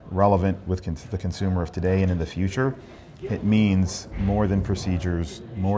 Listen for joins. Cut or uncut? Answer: uncut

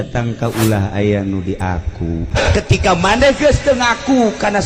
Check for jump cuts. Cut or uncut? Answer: cut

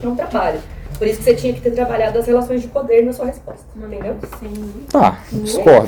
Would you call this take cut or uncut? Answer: uncut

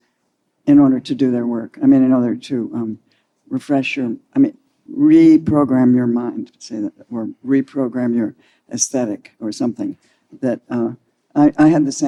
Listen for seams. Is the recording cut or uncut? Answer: uncut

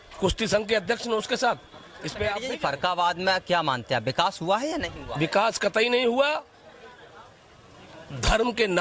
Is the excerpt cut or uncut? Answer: cut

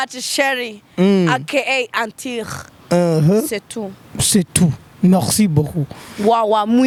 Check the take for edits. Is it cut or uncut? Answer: uncut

